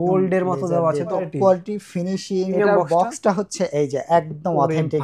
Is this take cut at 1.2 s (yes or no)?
yes